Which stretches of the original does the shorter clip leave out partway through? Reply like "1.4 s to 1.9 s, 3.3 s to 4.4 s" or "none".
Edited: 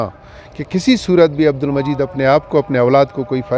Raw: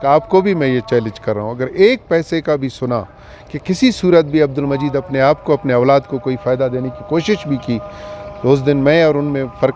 none